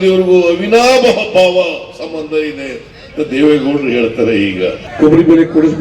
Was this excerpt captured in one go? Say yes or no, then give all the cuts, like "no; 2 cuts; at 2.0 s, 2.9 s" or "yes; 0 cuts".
no; 1 cut; at 4.8 s